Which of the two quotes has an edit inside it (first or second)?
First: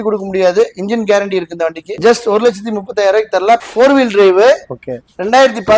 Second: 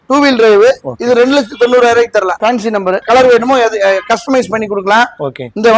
first